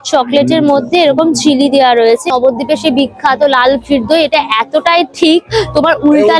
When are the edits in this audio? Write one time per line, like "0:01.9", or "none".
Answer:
0:02.3